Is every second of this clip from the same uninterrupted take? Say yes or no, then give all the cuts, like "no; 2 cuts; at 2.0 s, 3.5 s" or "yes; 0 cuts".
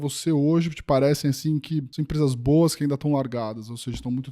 no; 1 cut; at 2.0 s